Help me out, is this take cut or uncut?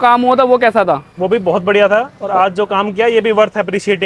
uncut